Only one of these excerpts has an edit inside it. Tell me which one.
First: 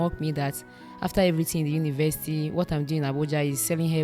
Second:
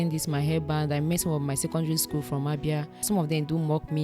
second; 1 cut; at 3.0 s

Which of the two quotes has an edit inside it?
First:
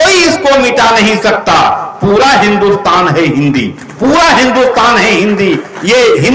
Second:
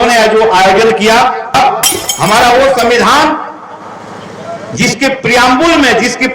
second; 1 cut; at 1.5 s

